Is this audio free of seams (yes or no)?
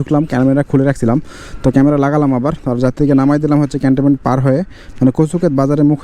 yes